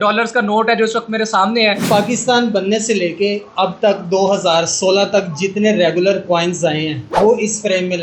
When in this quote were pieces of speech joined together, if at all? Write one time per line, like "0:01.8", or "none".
0:01.8
0:07.0